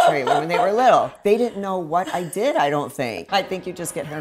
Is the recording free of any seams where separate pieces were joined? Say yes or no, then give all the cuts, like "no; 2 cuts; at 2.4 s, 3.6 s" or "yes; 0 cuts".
no; 2 cuts; at 1.2 s, 3.2 s